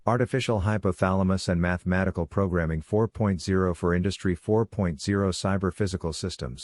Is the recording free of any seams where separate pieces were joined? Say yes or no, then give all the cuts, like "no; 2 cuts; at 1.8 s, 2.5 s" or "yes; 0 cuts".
no; 1 cut; at 2.8 s